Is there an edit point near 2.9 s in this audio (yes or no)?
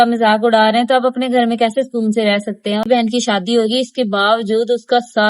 yes